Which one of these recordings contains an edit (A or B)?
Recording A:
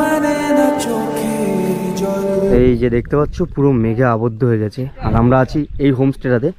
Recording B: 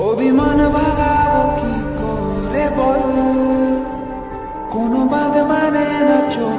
A